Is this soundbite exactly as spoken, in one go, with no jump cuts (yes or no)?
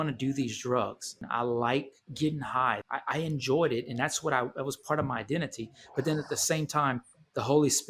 no